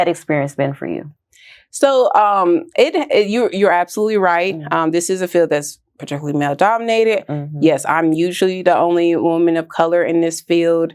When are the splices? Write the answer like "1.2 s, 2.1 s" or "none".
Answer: none